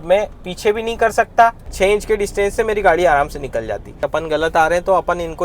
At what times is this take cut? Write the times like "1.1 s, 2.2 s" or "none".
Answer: 1.7 s, 3.9 s